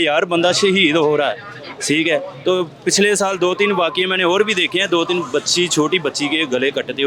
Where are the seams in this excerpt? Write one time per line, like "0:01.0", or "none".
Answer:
none